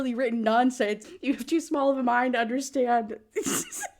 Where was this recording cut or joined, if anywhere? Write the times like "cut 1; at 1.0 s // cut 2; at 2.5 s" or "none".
cut 1; at 1.0 s